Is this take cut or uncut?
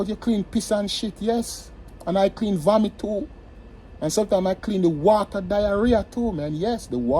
uncut